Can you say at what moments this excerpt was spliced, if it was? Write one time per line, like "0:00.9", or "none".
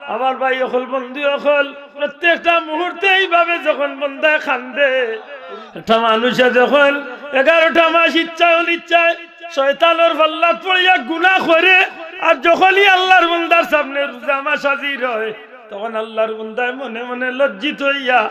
0:05.4

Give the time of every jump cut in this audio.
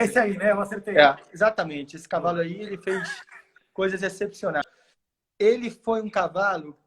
0:04.6

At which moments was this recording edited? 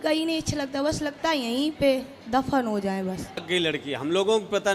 0:03.4

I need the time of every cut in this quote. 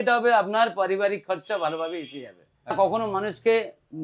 0:02.7

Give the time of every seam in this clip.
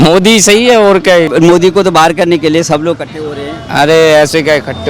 0:01.3

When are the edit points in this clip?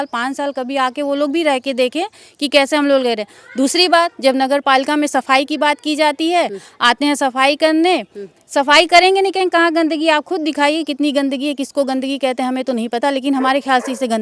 none

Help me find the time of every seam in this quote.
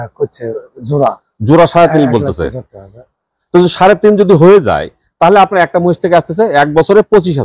none

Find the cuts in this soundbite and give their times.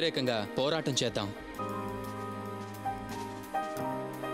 none

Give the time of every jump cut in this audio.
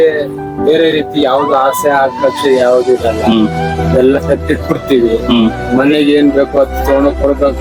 none

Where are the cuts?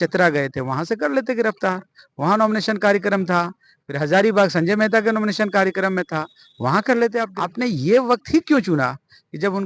0:07.4

